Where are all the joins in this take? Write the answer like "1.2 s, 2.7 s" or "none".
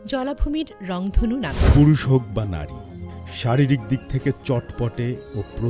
1.6 s